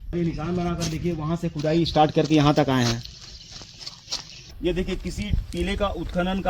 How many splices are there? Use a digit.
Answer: 1